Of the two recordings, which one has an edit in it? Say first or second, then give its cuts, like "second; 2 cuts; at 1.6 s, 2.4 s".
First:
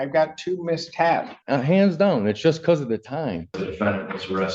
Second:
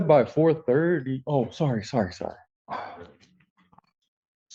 first; 2 cuts; at 1.4 s, 3.7 s